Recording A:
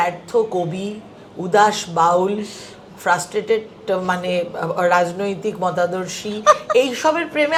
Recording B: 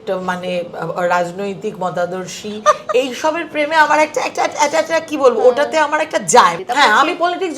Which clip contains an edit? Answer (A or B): B